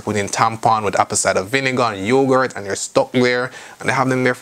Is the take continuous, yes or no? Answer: yes